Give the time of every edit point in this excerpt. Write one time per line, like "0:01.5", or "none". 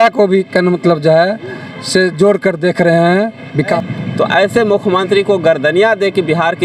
0:03.8